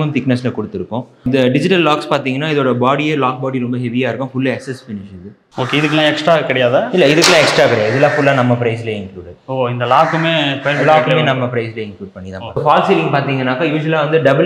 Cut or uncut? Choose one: cut